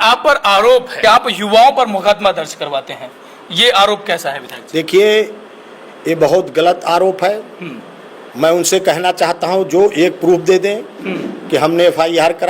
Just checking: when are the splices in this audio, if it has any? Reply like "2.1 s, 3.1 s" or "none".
0.9 s